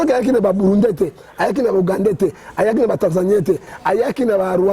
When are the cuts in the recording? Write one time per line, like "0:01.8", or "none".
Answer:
0:03.7